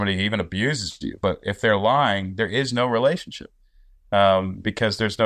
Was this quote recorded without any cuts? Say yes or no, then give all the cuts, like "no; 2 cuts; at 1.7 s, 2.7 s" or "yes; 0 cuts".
yes; 0 cuts